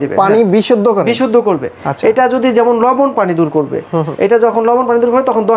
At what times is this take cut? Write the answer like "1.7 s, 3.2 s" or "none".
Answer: none